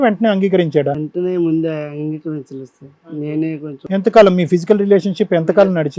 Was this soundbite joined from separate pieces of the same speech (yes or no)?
no